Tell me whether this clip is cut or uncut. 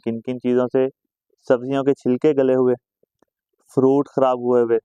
uncut